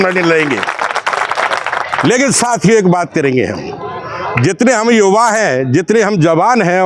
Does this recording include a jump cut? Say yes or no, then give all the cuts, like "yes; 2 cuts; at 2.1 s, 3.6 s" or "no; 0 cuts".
no; 0 cuts